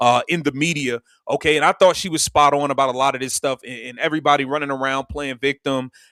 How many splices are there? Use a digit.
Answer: 0